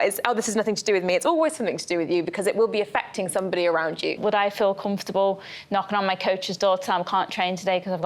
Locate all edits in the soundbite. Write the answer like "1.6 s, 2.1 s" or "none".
4.2 s